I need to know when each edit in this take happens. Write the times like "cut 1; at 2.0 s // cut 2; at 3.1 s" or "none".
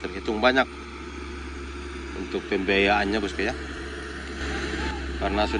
none